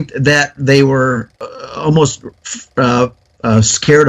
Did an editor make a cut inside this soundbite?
yes; 1 cut; at 1.3 s

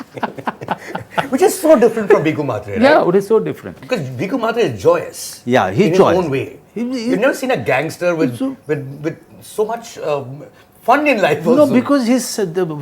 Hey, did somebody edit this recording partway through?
no; 0 cuts

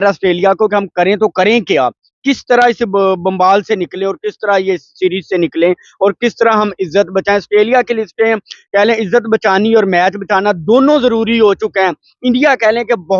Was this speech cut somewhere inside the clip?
no; 0 cuts

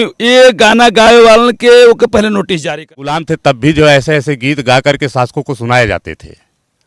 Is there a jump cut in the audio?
yes; 1 cut; at 3.2 s

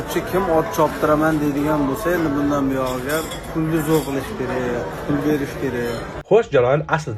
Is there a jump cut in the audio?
yes; 2 cuts; at 3.4 s, 6.2 s

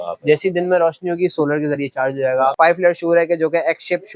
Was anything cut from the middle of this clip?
yes; 1 cut; at 2.5 s

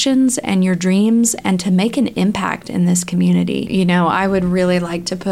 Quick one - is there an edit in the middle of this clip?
yes; 1 cut; at 3.7 s

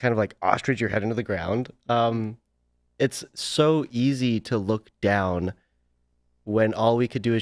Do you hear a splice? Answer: no; 0 cuts

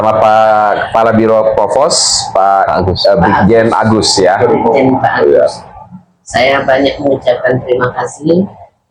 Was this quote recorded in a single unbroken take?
yes; 0 cuts

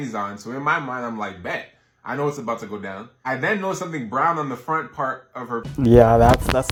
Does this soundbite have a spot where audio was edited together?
no; 0 cuts

